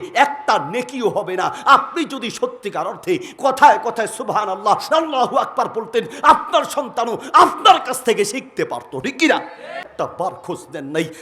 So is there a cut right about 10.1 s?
yes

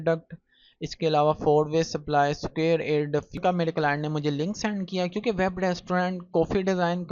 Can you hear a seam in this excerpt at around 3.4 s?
yes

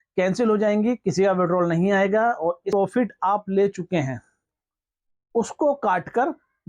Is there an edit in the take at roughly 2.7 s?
yes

